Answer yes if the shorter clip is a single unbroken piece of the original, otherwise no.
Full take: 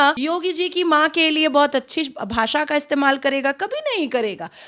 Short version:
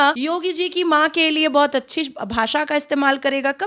yes